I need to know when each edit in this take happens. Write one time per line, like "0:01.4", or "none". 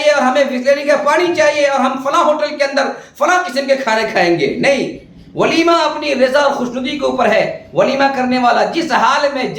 none